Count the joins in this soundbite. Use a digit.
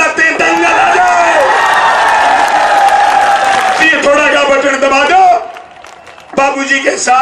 1